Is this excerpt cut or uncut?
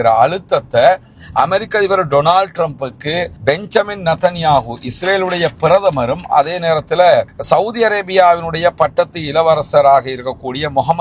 uncut